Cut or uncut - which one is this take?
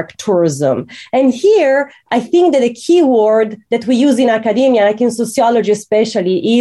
uncut